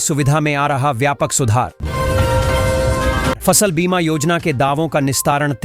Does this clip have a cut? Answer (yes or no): yes